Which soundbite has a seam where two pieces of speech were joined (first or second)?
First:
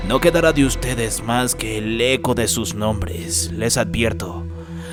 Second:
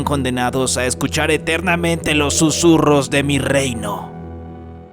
second